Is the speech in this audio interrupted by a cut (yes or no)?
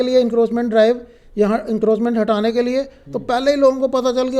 no